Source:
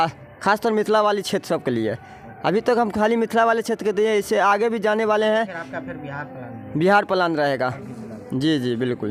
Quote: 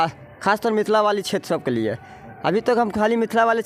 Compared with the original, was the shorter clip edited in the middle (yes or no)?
no